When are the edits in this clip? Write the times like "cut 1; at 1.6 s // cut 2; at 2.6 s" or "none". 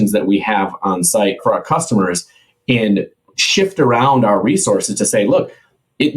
cut 1; at 1.4 s